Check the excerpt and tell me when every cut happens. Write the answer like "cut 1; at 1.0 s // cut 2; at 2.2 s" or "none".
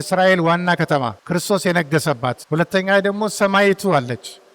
cut 1; at 1.2 s // cut 2; at 2.4 s